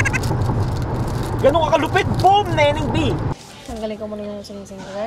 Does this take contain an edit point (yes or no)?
yes